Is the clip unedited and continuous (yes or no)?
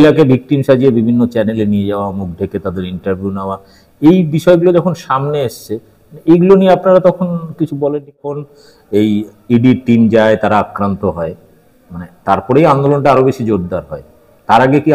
no